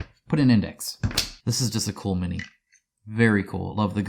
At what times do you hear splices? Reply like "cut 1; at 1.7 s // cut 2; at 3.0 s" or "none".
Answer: cut 1; at 1.3 s